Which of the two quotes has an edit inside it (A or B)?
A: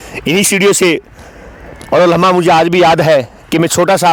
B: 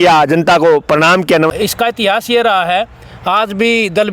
B